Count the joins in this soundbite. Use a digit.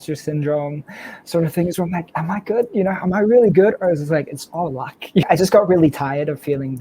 1